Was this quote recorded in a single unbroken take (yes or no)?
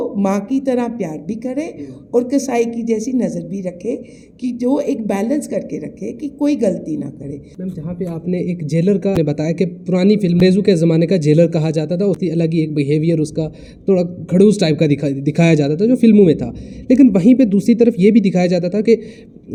yes